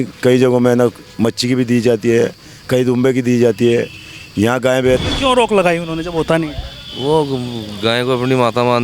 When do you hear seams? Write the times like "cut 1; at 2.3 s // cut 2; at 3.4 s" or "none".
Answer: cut 1; at 5.0 s